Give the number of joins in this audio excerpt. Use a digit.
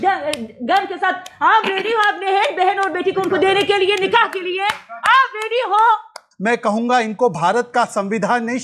1